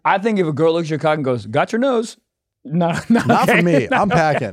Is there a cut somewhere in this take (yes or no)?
no